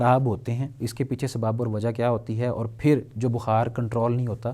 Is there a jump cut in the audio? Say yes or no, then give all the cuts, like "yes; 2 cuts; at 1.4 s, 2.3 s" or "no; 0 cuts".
no; 0 cuts